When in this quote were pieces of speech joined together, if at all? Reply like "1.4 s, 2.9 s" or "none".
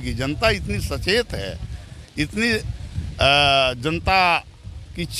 none